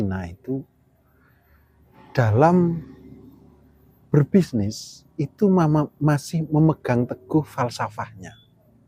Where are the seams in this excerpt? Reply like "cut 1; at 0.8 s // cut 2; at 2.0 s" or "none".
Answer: cut 1; at 2.0 s

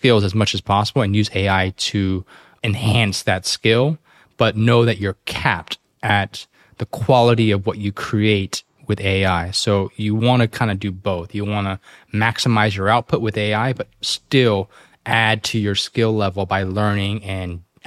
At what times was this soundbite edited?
cut 1; at 2.5 s

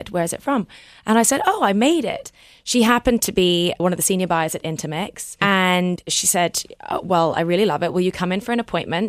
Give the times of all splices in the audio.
cut 1; at 3.8 s // cut 2; at 5.3 s // cut 3; at 6.0 s

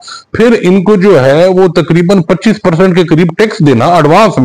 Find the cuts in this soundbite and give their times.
none

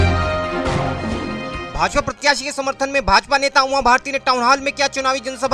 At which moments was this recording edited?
cut 1; at 1.6 s

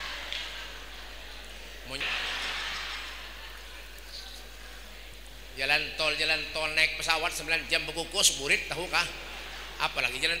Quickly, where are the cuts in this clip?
cut 1; at 2.0 s

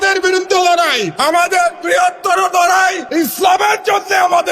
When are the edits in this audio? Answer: cut 1; at 1.1 s // cut 2; at 3.0 s

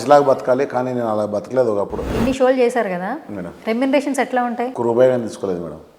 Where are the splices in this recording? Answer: cut 1; at 2.1 s // cut 2; at 4.7 s

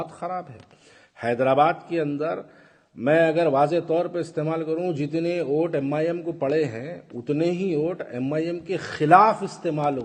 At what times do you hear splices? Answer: none

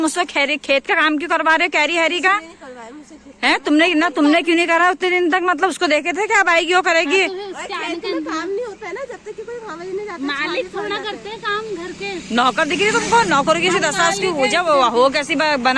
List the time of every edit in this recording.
none

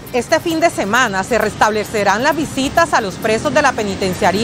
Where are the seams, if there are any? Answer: none

